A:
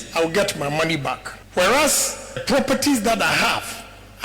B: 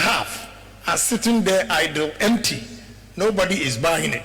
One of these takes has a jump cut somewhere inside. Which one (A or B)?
A